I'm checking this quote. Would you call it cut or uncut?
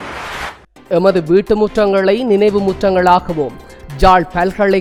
uncut